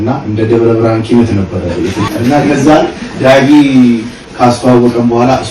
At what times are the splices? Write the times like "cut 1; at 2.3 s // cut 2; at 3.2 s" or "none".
cut 1; at 2.1 s // cut 2; at 4.2 s